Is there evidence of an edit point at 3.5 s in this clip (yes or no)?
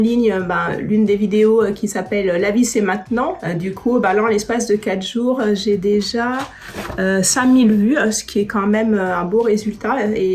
yes